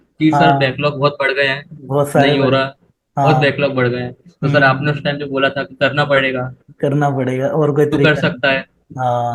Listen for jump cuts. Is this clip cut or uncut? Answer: uncut